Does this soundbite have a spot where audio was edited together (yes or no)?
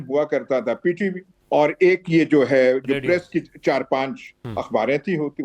yes